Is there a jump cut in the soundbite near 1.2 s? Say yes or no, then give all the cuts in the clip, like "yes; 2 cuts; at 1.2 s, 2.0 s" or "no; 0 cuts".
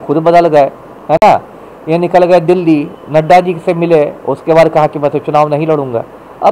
no; 0 cuts